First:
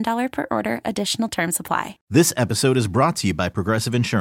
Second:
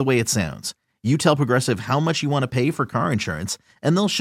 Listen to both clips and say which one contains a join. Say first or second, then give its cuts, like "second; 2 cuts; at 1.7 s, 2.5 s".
first; 1 cut; at 2.0 s